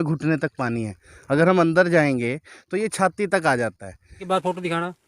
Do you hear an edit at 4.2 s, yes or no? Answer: yes